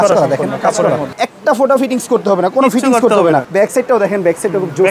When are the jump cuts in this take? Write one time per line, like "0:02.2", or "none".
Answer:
0:01.2
0:03.5